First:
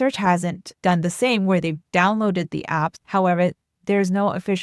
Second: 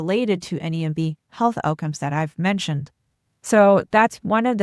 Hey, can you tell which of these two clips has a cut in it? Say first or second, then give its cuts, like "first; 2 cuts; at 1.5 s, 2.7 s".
first; 1 cut; at 3.0 s